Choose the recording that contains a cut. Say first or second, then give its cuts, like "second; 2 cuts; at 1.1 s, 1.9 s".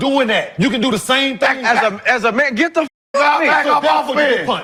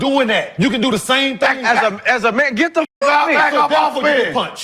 second; 1 cut; at 2.9 s